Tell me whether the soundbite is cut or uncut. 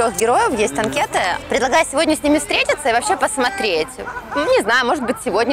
cut